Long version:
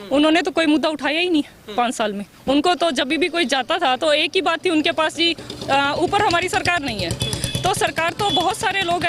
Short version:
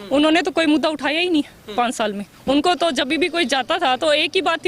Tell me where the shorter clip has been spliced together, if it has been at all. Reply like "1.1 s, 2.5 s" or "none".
none